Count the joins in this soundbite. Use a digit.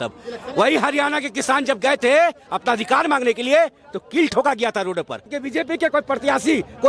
1